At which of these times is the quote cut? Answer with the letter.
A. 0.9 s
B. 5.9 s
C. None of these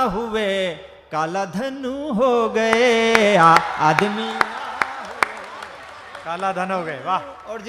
C